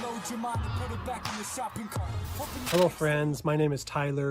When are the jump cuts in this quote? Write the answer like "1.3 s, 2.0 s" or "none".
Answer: 2.7 s